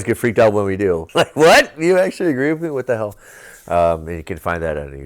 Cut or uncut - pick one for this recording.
cut